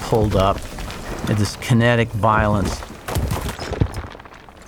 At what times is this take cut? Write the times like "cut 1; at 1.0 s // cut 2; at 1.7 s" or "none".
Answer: cut 1; at 2.6 s

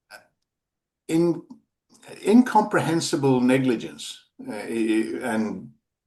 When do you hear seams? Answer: none

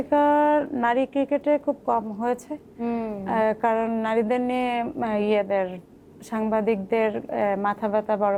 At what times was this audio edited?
none

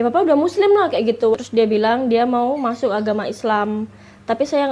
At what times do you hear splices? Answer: cut 1; at 1.4 s

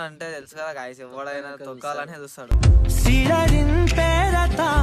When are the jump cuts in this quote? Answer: none

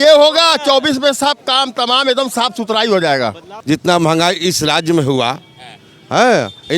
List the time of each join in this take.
cut 1; at 3.5 s

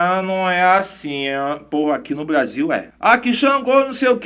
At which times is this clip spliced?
none

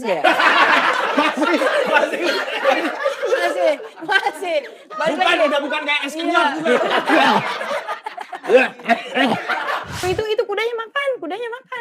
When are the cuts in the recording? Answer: cut 1; at 9.9 s

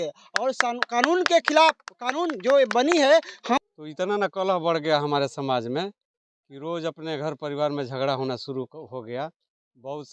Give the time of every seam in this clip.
cut 1; at 3.6 s

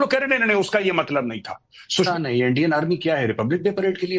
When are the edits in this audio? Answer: cut 1; at 2.1 s

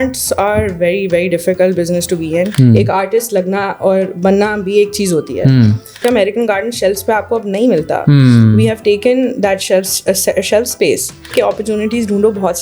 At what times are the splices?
cut 1; at 2.5 s // cut 2; at 6.0 s // cut 3; at 11.3 s

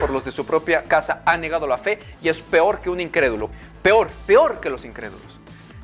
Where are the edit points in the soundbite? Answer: cut 1; at 3.5 s

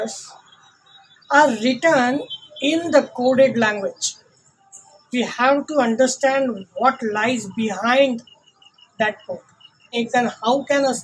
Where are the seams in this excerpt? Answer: cut 1; at 10.0 s

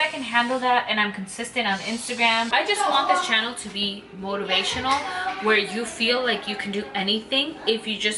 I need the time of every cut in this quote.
cut 1; at 2.5 s

